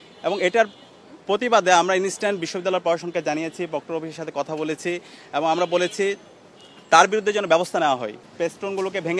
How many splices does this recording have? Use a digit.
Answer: 1